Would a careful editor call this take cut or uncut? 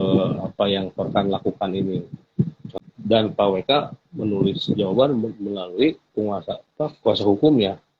cut